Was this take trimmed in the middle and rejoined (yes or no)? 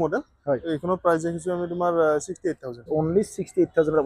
yes